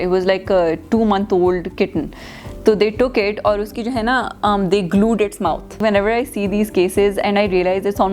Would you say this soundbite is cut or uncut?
cut